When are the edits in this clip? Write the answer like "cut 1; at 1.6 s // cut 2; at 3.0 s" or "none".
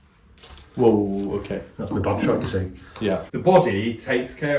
cut 1; at 3.3 s